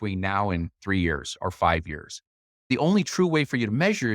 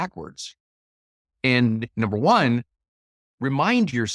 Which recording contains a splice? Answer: first; 1 cut; at 2.7 s

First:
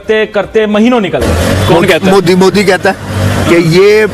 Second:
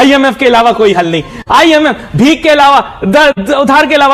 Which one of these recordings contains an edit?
first; 1 cut; at 1.3 s

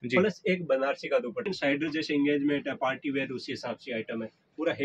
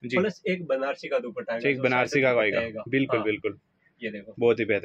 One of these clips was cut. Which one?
first; 1 cut; at 1.4 s

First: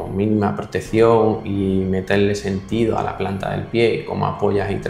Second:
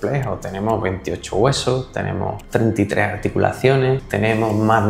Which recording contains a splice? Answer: second; 2 cuts; at 2.4 s, 4.1 s

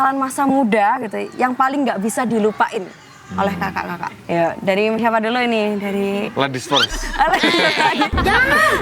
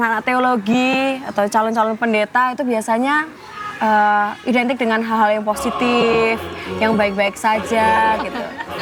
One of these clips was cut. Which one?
first; 1 cut; at 4.2 s

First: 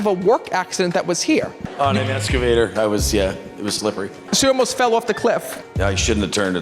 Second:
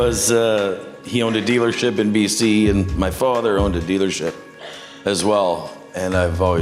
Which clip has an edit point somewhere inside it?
first; 3 cuts; at 1.6 s, 4.2 s, 5.6 s

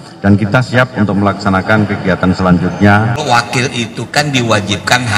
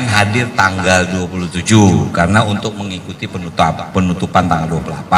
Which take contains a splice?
first; 1 cut; at 3.2 s

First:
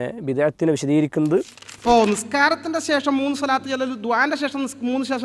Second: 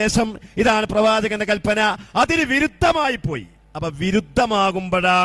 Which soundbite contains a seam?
first; 1 cut; at 1.6 s

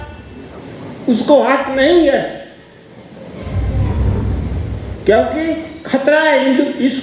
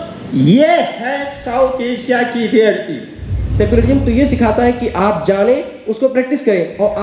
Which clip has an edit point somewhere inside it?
second; 1 cut; at 3.4 s

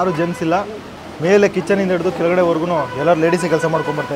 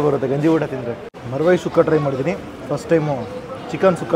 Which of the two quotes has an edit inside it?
second; 1 cut; at 1.2 s

